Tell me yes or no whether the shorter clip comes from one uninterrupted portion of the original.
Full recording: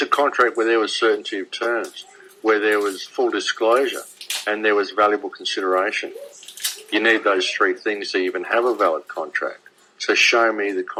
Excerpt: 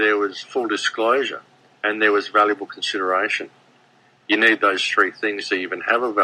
yes